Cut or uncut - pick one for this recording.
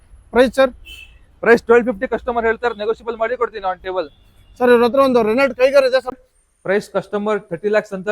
cut